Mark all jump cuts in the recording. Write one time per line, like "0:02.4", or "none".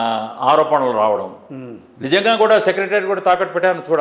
0:01.5